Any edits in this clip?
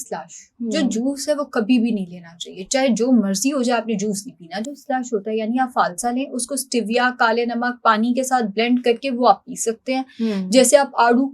no; 0 cuts

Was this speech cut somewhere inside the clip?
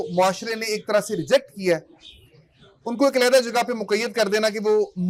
no; 0 cuts

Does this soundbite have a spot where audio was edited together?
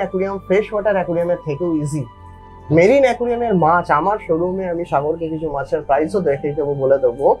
no; 0 cuts

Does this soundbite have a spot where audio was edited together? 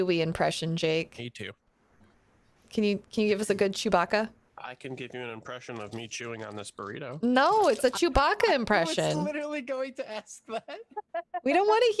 no; 0 cuts

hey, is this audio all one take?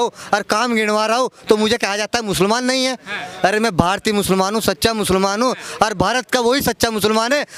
yes; 0 cuts

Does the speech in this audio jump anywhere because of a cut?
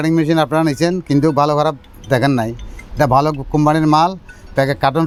no; 0 cuts

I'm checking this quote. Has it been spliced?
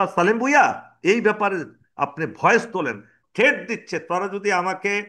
yes; 1 cut; at 3.2 s

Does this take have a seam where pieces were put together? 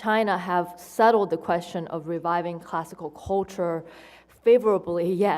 yes; 1 cut; at 3.8 s

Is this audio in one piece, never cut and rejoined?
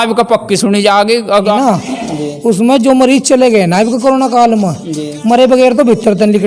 no; 1 cut; at 1.5 s

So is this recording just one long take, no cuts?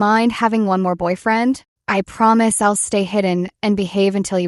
yes; 0 cuts

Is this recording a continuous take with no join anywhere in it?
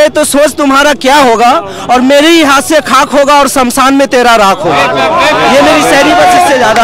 yes; 0 cuts

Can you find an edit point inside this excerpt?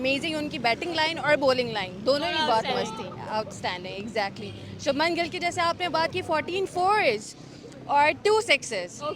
no; 0 cuts

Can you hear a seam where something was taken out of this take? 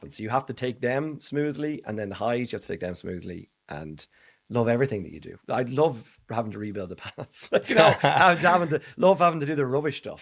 no; 0 cuts

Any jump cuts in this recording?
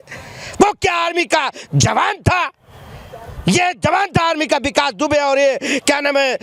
no; 0 cuts

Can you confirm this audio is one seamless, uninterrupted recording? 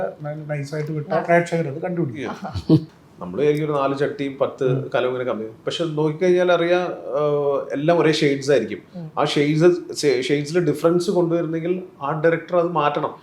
no; 1 cut; at 2.9 s

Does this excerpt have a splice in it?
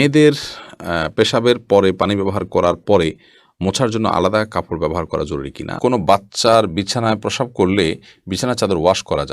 yes; 1 cut; at 5.7 s

